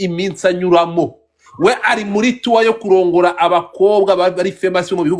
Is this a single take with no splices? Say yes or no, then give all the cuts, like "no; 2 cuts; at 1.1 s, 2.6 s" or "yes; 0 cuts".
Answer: yes; 0 cuts